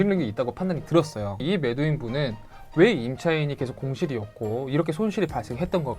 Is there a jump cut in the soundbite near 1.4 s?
yes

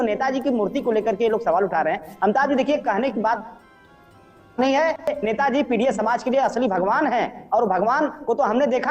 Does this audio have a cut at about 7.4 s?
no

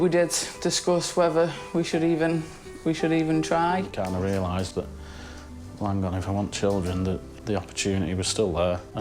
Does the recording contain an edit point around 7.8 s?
no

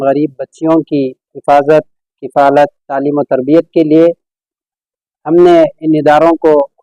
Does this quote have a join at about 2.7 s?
no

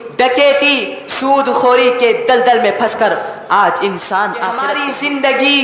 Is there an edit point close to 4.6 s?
yes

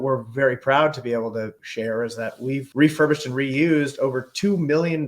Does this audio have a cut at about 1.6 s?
yes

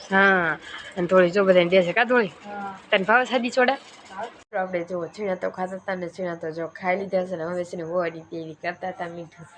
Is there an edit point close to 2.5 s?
no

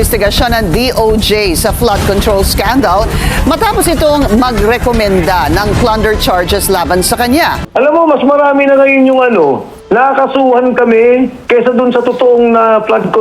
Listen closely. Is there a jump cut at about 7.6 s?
yes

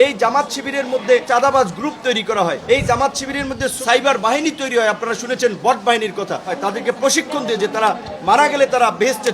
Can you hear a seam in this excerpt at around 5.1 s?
no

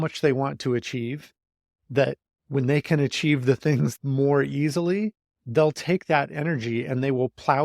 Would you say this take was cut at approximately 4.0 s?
yes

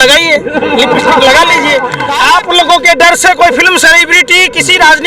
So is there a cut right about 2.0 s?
yes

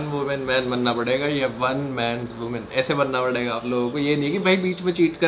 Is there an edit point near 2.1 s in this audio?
no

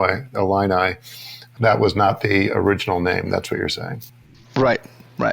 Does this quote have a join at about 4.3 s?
no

